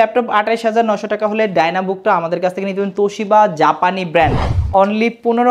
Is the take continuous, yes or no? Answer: no